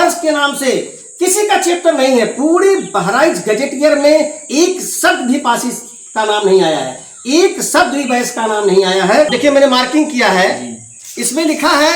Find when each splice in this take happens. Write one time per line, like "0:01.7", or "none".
0:09.3